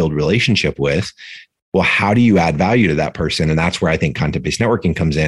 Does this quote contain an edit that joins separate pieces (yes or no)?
yes